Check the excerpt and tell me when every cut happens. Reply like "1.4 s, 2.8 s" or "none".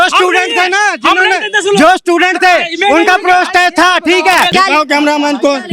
4.5 s